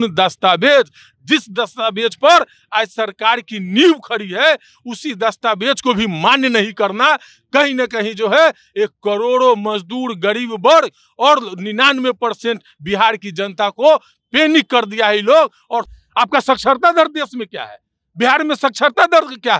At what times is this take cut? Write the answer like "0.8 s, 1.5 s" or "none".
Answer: 15.9 s